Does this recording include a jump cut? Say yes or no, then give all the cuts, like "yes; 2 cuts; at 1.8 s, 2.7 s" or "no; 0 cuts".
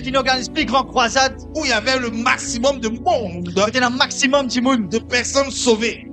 no; 0 cuts